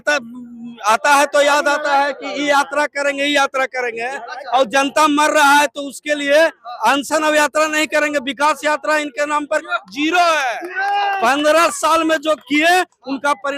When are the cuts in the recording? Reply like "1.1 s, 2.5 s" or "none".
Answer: none